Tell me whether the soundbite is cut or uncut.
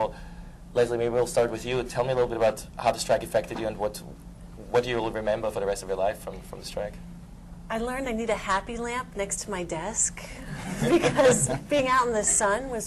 cut